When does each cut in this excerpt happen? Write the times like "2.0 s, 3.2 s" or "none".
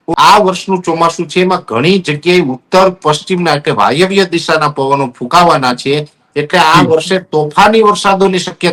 none